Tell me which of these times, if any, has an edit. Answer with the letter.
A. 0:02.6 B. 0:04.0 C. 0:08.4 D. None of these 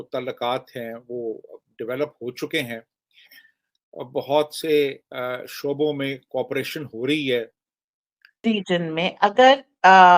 C